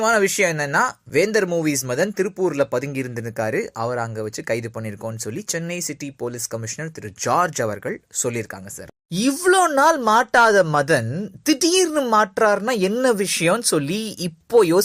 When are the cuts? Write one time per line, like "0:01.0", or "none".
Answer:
0:06.0